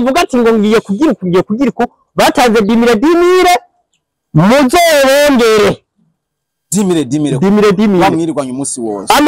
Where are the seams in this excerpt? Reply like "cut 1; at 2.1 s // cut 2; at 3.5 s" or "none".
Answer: none